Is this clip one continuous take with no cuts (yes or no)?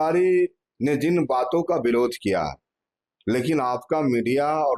yes